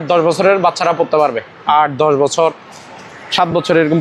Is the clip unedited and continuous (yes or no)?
yes